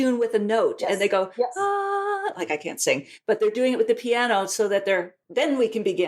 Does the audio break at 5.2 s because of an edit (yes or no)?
yes